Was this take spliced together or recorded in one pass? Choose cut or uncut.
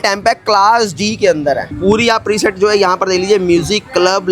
cut